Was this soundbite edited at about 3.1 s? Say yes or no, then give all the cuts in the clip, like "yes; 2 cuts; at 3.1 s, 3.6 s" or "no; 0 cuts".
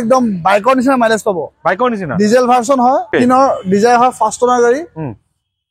yes; 1 cut; at 3.1 s